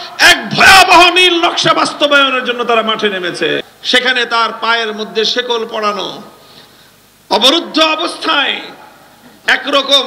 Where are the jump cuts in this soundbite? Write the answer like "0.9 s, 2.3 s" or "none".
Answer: 3.6 s